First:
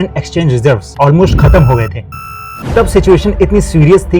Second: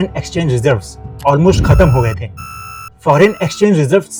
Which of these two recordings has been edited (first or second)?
first